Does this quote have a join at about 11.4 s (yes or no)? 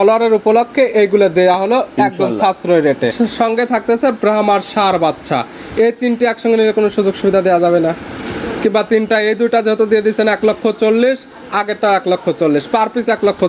no